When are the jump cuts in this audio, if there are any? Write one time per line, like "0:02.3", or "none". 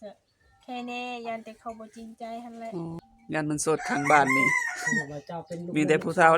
0:03.0